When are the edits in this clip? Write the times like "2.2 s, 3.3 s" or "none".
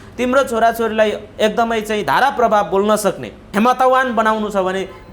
3.3 s